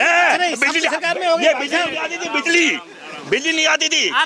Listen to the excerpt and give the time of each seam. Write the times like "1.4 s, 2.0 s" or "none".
none